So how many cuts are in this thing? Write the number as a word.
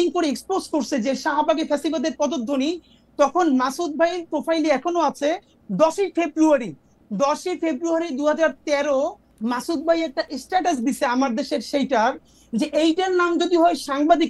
zero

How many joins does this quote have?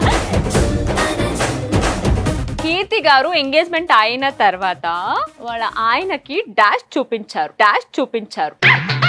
one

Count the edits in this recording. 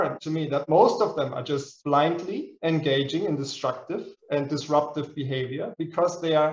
zero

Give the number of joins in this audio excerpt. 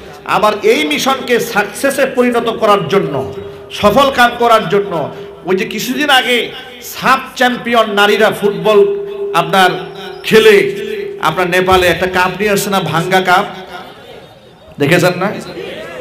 zero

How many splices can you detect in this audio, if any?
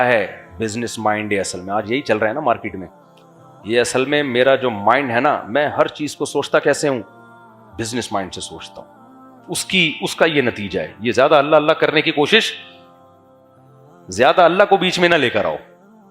zero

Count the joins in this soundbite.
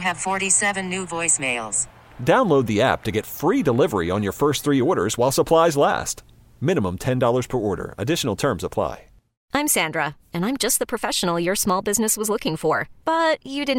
one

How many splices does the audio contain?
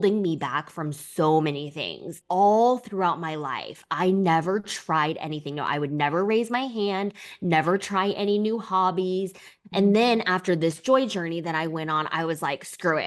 two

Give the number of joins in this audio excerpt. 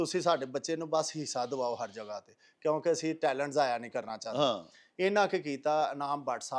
zero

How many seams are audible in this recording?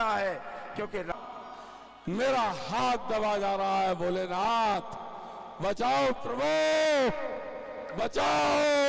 one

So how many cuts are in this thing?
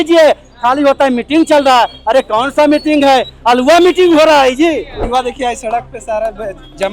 one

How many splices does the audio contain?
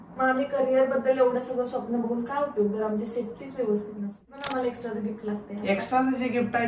one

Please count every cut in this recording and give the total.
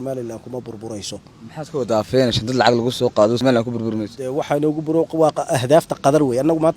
one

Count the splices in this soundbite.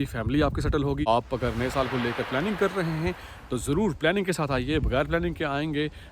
one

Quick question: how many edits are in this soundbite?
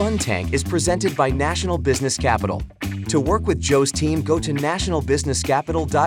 zero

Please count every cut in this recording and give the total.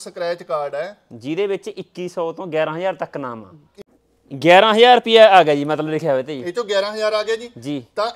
one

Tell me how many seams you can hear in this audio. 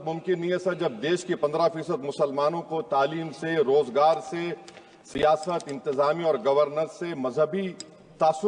zero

